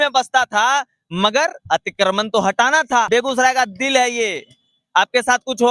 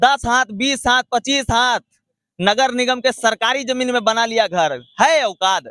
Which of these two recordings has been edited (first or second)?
first